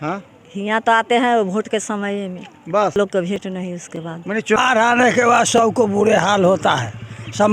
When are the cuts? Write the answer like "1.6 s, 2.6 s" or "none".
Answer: 3.0 s, 4.6 s